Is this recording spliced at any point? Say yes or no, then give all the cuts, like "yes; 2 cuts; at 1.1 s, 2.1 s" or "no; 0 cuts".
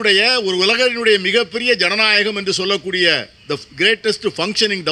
no; 0 cuts